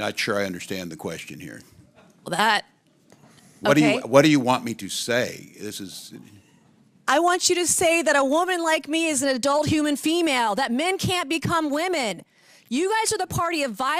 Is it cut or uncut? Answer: uncut